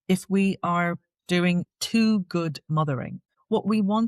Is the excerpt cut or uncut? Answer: cut